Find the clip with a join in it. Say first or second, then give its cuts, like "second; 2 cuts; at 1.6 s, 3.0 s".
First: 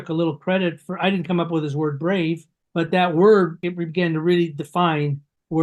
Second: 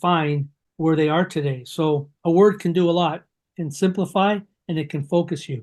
first; 2 cuts; at 2.5 s, 3.6 s